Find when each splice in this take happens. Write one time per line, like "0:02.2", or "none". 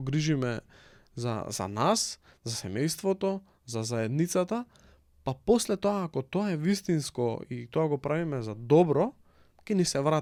none

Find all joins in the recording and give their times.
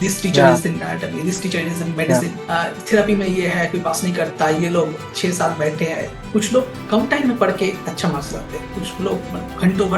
0:06.2

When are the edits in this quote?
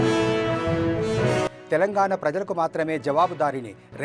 0:01.5

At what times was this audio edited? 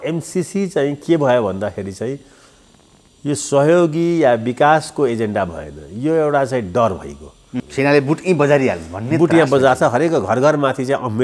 0:07.5

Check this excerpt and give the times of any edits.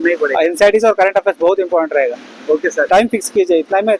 0:02.9

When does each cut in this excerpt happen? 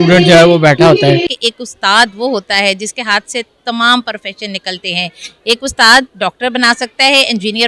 0:01.3

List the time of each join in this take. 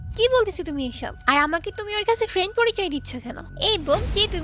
0:01.1

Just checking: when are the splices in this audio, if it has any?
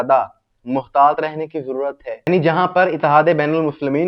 0:02.3

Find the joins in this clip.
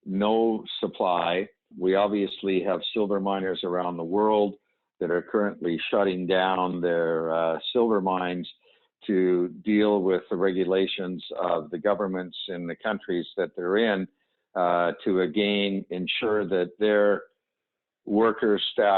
0:01.7

